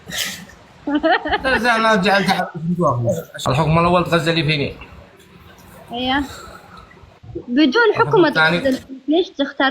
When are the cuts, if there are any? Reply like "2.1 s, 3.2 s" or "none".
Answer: 3.3 s